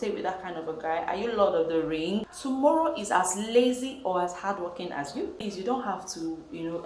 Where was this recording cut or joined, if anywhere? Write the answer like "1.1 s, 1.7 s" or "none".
2.3 s, 5.4 s

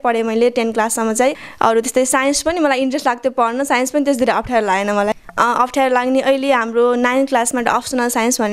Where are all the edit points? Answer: 1.5 s, 5.2 s

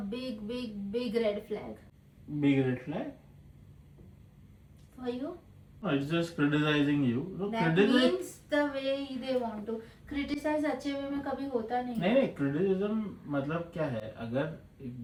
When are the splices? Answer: none

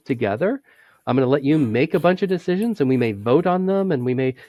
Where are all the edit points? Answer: none

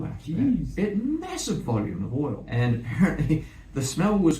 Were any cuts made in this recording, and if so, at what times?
2.4 s

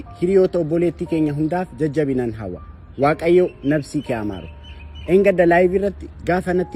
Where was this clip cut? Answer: none

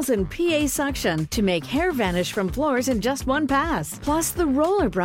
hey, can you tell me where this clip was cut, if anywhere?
none

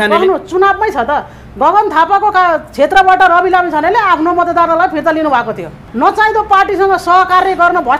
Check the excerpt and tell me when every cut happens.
5.8 s

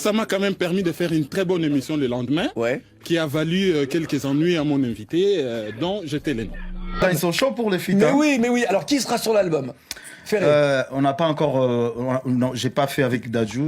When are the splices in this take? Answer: 7.0 s

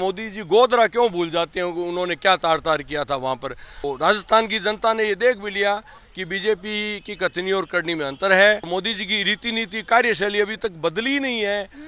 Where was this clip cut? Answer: 3.8 s, 8.7 s

